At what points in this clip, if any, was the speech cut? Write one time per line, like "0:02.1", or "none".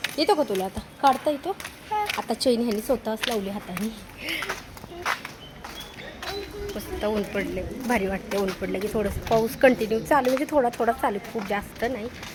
none